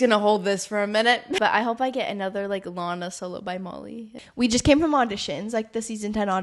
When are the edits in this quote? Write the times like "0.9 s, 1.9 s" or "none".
1.4 s, 4.2 s

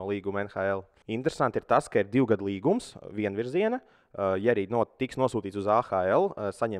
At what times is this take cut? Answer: 0.9 s

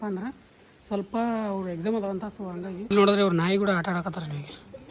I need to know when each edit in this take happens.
2.9 s

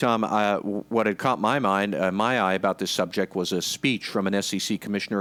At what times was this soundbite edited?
none

